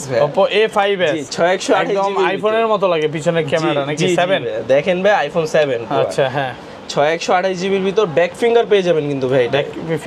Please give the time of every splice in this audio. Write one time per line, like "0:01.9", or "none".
none